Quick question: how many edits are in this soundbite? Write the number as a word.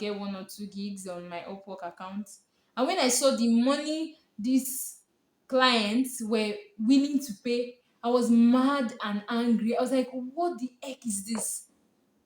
zero